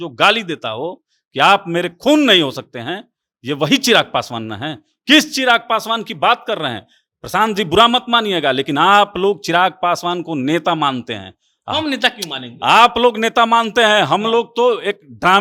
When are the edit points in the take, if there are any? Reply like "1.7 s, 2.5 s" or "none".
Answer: none